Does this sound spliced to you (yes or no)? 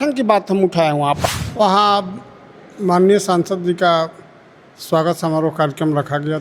yes